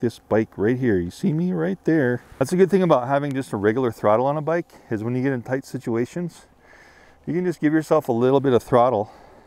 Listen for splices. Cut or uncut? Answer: cut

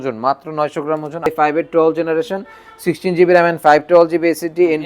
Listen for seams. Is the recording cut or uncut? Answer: cut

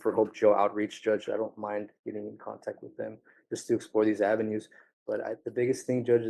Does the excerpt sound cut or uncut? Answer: uncut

